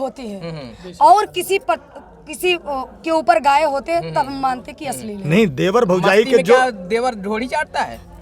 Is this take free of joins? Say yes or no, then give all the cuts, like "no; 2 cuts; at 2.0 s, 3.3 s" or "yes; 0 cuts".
yes; 0 cuts